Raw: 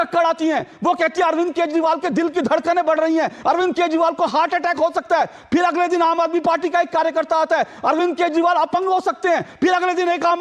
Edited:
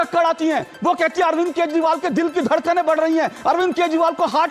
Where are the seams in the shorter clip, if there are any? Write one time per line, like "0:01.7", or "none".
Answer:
none